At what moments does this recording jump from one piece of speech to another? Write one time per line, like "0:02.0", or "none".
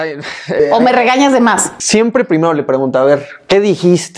0:01.7

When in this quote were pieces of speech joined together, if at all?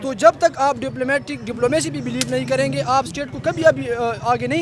none

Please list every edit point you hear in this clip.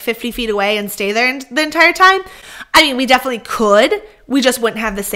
none

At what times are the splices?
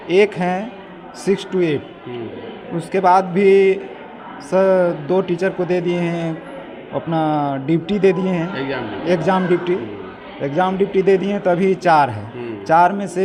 none

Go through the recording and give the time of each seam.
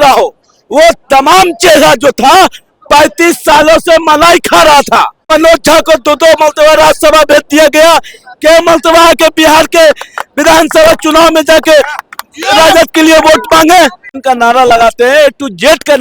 0:05.3
0:14.2

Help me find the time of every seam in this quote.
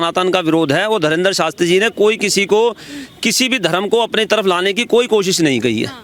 none

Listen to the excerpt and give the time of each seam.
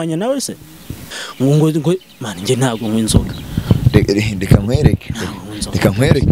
0:01.2

